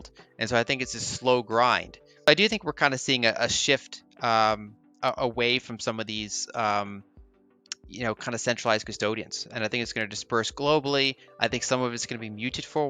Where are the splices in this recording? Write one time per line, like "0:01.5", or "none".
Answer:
0:02.3